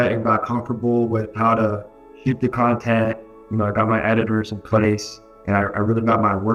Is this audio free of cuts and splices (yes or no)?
yes